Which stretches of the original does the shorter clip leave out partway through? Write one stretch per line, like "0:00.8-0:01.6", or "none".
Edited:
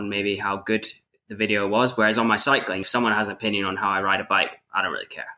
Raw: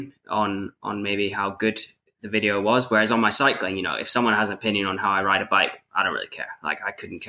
0:03.8-0:04.0